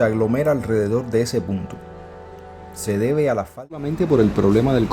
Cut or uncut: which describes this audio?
cut